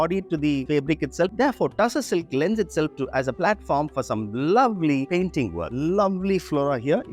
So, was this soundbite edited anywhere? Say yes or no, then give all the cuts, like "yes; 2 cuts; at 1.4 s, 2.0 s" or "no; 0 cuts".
yes; 2 cuts; at 1.3 s, 5.7 s